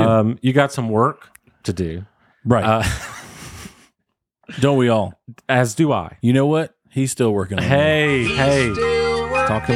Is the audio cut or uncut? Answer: uncut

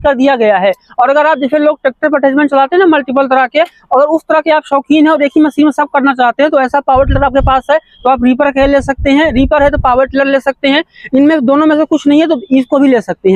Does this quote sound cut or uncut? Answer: uncut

